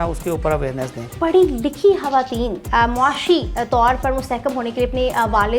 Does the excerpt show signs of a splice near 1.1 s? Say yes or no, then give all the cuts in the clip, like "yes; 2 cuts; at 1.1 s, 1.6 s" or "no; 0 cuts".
yes; 2 cuts; at 1.1 s, 2.6 s